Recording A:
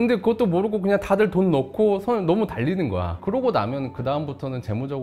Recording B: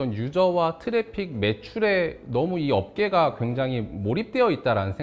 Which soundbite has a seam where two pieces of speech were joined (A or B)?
A